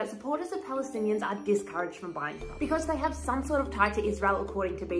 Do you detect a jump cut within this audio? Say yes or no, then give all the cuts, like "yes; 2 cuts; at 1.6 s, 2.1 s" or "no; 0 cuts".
no; 0 cuts